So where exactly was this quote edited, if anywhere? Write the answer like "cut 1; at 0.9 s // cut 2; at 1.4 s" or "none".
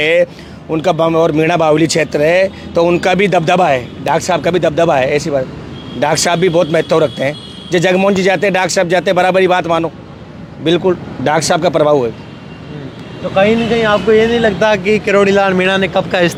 none